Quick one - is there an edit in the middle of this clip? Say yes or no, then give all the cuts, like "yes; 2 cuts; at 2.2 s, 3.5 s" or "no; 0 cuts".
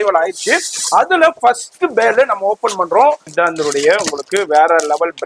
yes; 1 cut; at 3.3 s